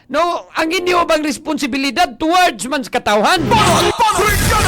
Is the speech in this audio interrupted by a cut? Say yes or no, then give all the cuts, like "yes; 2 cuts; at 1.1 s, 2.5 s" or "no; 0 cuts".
yes; 1 cut; at 3.5 s